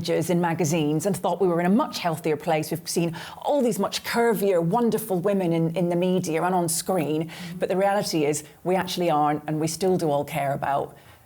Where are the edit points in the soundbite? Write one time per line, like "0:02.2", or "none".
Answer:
none

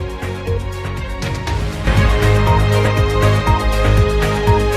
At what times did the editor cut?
0:01.1

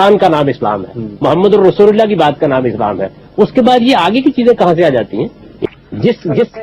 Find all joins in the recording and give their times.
0:05.4

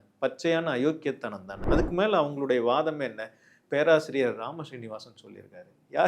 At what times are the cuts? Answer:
0:01.6

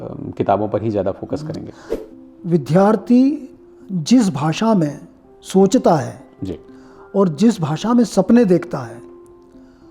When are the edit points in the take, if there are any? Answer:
0:02.0

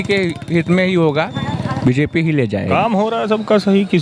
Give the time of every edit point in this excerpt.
0:01.4
0:02.7

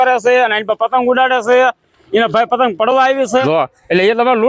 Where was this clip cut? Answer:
0:03.4

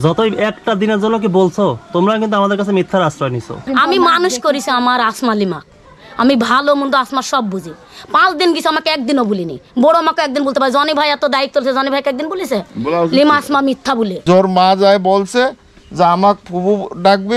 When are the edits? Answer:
0:03.7
0:14.2

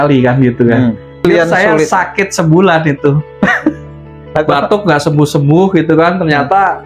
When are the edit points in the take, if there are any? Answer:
0:01.2

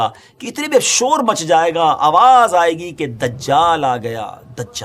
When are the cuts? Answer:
none

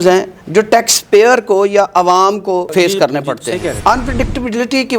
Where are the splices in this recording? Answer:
0:02.7
0:03.7

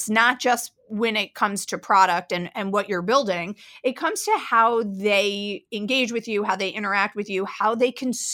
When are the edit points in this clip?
none

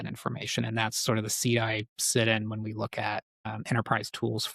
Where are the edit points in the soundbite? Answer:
none

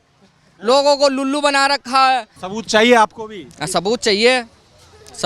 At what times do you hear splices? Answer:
0:02.4

